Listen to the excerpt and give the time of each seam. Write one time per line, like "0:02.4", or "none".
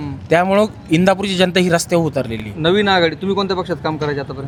none